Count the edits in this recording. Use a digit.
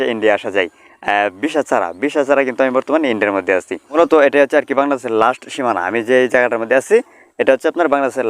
1